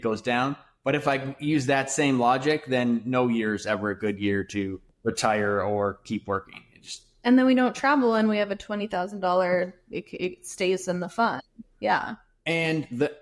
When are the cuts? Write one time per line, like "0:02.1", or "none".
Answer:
0:04.8